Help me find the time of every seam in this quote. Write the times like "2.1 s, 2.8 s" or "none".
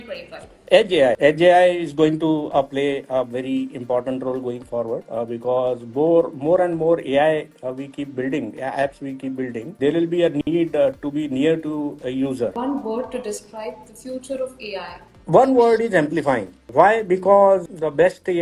12.5 s